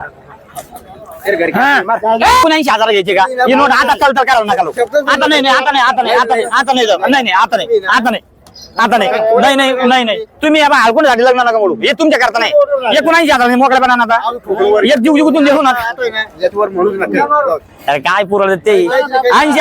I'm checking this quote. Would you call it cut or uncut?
cut